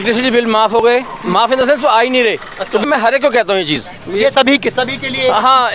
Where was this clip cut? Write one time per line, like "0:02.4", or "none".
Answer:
0:02.8